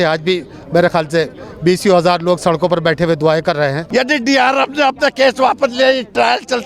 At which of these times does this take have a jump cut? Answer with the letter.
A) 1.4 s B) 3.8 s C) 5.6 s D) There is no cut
B